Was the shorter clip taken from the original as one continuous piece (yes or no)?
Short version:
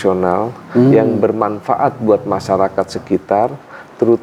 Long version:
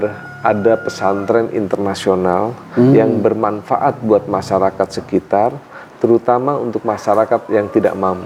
yes